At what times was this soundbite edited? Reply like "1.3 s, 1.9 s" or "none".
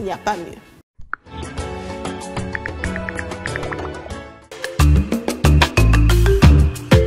4.5 s